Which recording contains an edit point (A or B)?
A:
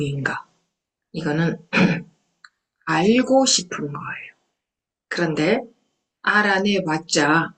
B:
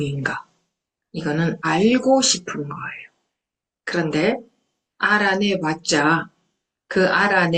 B